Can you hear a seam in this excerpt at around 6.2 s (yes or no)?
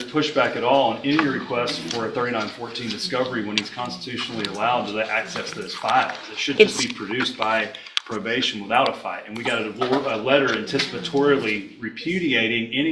no